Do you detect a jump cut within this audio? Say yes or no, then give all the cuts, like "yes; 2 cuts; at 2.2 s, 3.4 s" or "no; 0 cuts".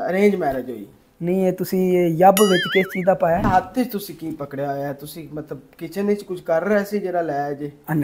yes; 1 cut; at 3.4 s